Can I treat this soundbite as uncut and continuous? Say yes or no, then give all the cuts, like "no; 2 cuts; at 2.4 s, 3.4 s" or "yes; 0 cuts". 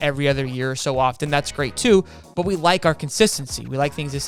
yes; 0 cuts